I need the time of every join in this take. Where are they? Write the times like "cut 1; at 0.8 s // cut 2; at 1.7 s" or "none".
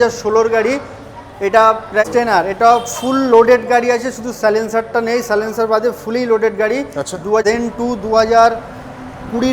cut 1; at 2.0 s // cut 2; at 7.4 s